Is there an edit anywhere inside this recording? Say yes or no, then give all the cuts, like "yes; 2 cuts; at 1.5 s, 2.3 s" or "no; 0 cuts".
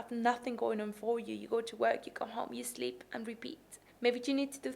yes; 1 cut; at 3.7 s